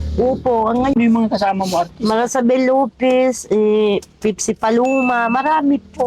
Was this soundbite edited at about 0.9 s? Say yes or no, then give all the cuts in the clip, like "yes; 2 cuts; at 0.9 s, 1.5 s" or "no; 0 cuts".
yes; 1 cut; at 0.9 s